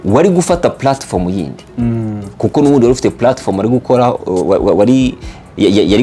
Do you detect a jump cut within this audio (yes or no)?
no